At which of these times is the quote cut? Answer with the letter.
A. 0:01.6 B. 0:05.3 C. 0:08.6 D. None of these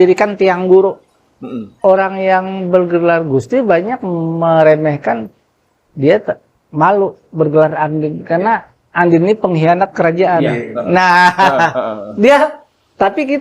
A